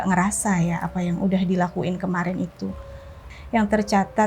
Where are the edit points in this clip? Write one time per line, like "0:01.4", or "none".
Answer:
0:03.3